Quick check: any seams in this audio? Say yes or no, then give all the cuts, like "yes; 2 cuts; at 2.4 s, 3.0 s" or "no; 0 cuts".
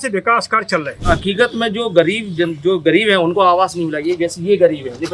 yes; 1 cut; at 1.0 s